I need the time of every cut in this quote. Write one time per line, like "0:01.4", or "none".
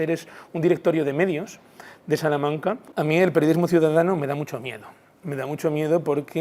0:02.9